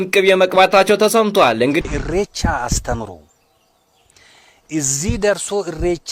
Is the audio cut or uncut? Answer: cut